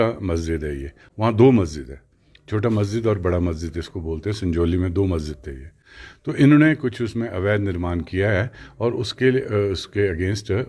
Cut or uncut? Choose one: uncut